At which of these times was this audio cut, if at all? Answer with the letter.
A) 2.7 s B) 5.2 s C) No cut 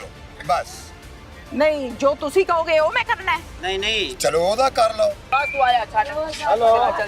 B